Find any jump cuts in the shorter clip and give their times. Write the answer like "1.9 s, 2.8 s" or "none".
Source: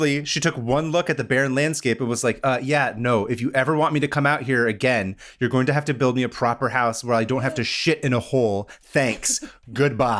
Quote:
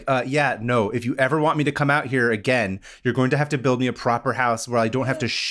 none